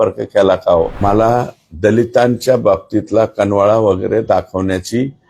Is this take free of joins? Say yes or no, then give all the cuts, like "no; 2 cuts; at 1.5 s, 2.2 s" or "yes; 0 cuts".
no; 1 cut; at 0.9 s